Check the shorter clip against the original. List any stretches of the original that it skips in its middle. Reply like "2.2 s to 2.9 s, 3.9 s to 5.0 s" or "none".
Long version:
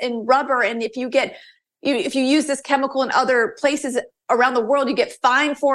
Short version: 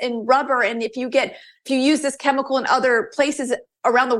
1.6 s to 2.1 s

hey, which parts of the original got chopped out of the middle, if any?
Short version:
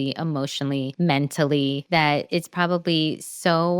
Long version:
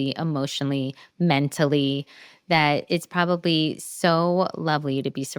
0.9 s to 1.1 s, 2.0 s to 2.4 s

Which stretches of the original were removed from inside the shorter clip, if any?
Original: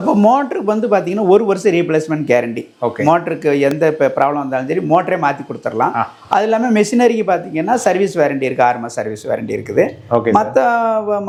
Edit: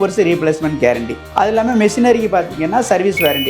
2.7 s to 6.2 s

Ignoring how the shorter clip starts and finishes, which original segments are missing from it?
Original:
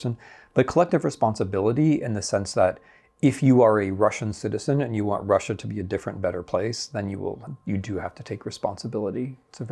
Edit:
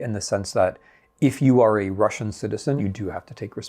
4.8 s to 7.7 s

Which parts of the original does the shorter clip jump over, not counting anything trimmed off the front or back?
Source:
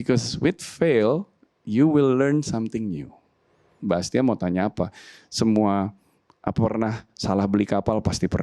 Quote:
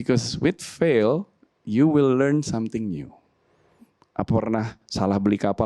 3.7 s to 6.0 s

